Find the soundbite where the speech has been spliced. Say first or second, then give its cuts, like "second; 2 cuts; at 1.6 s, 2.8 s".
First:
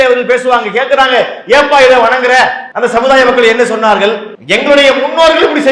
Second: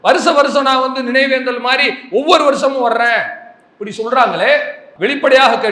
first; 2 cuts; at 2.6 s, 4.3 s